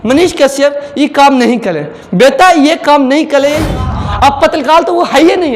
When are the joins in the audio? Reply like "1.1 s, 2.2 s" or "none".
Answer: 3.8 s